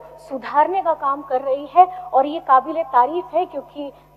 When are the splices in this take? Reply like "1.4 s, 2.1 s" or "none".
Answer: none